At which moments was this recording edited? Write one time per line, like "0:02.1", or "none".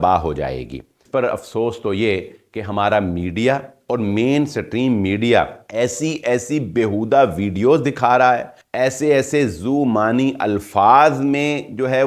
0:01.0
0:05.6
0:08.6